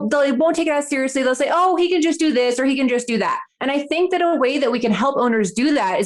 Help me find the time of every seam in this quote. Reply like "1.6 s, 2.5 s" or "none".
3.5 s